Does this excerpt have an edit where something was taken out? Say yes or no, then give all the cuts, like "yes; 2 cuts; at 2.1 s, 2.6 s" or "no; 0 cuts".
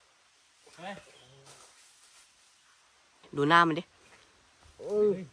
yes; 1 cut; at 3.3 s